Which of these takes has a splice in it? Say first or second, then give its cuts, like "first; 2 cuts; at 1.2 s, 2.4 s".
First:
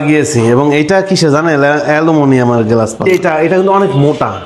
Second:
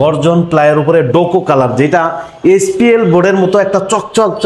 first; 1 cut; at 3.1 s